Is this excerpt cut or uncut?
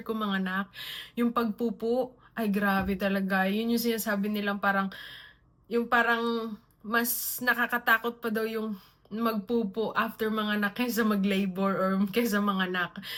uncut